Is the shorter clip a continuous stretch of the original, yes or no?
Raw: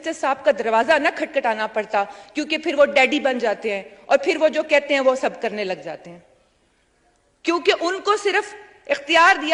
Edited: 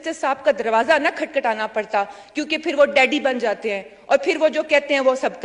yes